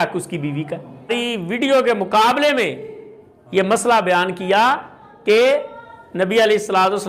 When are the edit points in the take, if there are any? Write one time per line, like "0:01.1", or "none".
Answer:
0:01.1

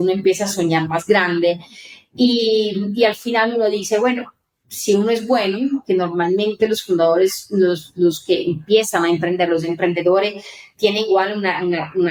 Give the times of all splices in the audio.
none

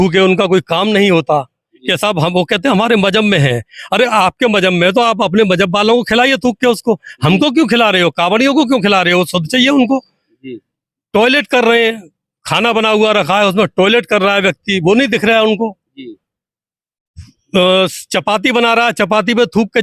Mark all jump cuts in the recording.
none

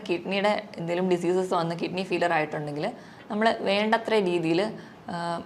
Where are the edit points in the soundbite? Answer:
none

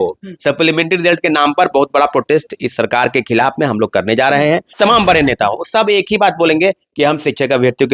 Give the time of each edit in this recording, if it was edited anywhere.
0:04.7

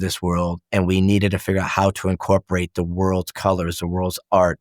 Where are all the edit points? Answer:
none

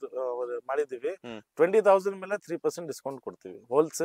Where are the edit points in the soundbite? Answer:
none

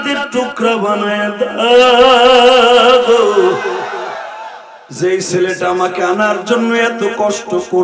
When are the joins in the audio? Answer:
none

